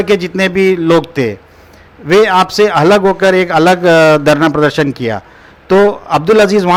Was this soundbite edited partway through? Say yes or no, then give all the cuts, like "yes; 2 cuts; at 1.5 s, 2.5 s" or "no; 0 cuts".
no; 0 cuts